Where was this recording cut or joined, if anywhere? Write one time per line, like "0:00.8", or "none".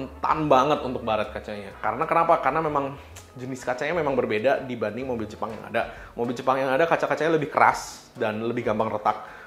none